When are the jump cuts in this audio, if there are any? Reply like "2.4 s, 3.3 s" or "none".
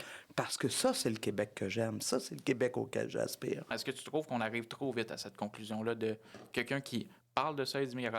3.8 s